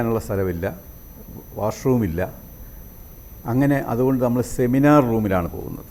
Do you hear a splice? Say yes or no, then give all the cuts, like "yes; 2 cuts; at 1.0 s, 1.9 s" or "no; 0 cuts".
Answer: no; 0 cuts